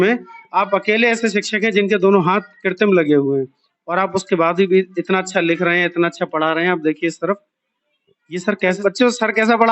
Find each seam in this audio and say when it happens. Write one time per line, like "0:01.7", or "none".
0:08.8